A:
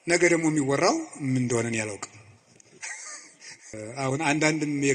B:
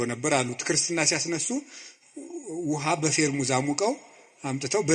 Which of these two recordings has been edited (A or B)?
A